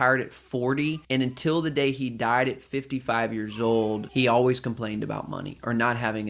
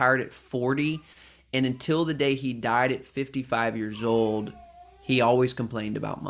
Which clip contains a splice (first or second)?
first